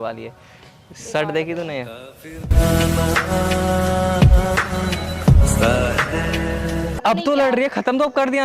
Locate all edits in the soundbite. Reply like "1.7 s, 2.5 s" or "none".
6.9 s